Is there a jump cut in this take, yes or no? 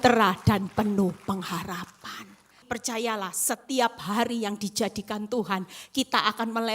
yes